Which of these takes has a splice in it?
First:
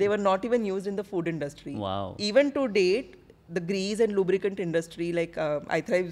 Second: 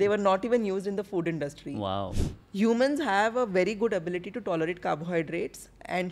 second; 1 cut; at 2.1 s

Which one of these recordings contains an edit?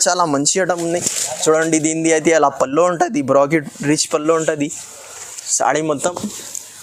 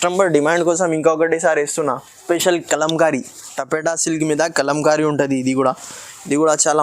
second; 1 cut; at 2.1 s

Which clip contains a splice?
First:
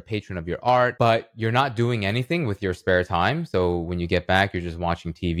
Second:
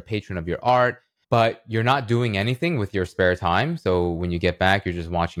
first; 1 cut; at 0.9 s

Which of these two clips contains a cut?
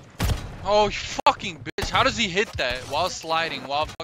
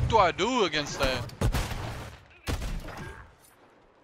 second; 1 cut; at 1.3 s

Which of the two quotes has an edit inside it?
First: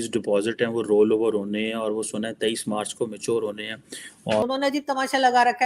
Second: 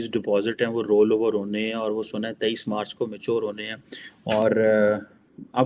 first; 1 cut; at 4.4 s

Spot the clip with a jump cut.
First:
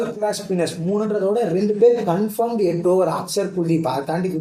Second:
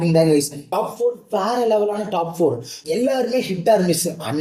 second; 1 cut; at 2.7 s

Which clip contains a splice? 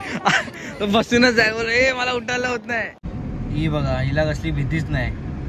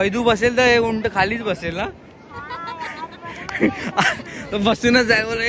first; 1 cut; at 3.0 s

